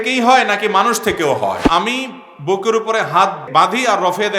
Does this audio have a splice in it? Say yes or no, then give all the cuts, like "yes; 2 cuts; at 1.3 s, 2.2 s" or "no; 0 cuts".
yes; 2 cuts; at 1.6 s, 3.4 s